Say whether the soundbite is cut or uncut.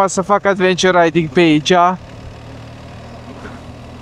uncut